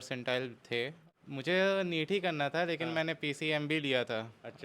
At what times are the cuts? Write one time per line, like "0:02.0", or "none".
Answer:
0:01.0